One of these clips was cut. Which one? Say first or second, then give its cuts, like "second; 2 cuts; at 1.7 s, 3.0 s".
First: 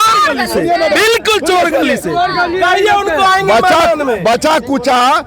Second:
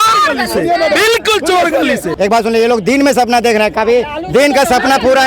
second; 1 cut; at 2.1 s